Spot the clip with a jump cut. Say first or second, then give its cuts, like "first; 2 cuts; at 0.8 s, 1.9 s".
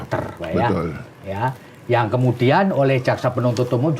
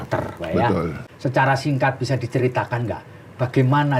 second; 1 cut; at 1.0 s